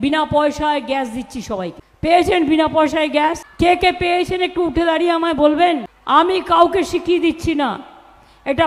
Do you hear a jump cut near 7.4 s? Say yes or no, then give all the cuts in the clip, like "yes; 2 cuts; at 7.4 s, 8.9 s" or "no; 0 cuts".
no; 3 cuts; at 1.8 s, 3.5 s, 5.9 s